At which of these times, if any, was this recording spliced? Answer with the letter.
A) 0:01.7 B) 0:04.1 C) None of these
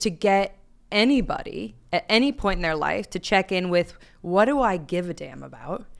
C